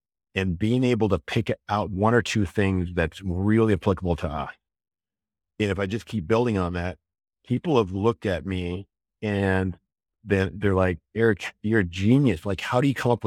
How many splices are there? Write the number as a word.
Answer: one